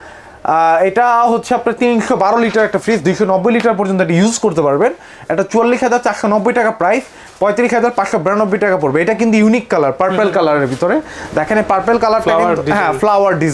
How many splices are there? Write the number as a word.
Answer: zero